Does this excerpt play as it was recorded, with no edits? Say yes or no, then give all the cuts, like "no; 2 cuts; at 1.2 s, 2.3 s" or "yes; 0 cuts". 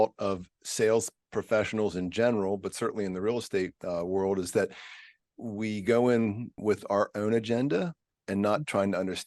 no; 1 cut; at 6.6 s